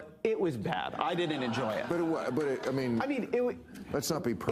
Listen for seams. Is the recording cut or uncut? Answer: uncut